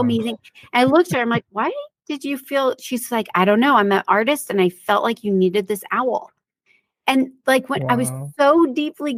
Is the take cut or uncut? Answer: uncut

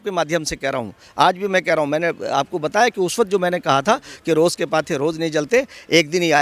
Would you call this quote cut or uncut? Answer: uncut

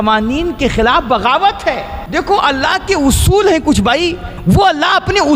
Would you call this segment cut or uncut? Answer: cut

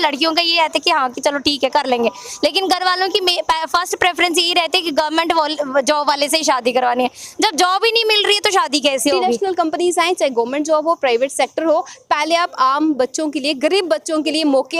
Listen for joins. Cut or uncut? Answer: cut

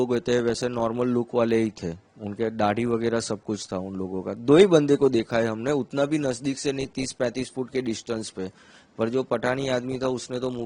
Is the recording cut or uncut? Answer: uncut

